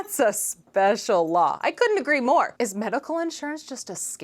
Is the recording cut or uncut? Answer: cut